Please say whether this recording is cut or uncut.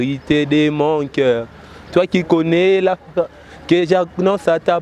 uncut